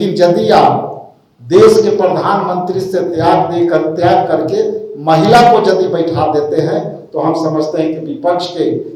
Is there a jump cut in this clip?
no; 0 cuts

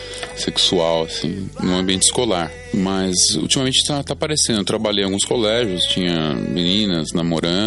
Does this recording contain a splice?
yes; 1 cut; at 2.6 s

